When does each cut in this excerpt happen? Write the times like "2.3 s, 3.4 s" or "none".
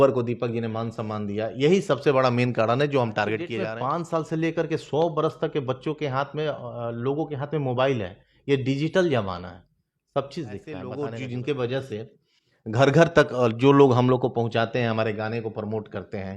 3.6 s, 10.9 s